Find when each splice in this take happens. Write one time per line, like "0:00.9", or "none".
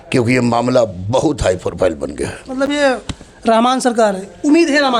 none